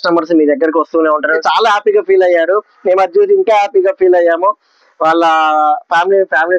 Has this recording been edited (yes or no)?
yes